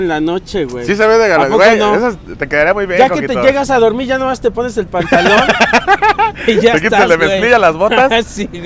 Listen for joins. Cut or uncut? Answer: uncut